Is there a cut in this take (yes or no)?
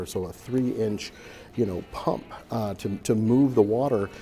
no